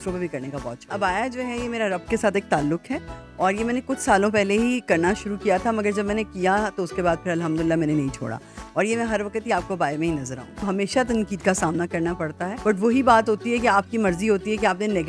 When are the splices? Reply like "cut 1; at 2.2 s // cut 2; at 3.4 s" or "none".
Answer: cut 1; at 0.8 s // cut 2; at 10.6 s // cut 3; at 12.5 s